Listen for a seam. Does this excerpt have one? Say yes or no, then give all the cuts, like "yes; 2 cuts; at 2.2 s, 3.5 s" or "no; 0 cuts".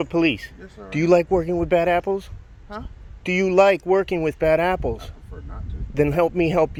no; 0 cuts